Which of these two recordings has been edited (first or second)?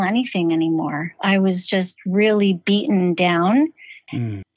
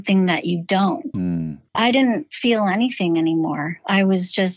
second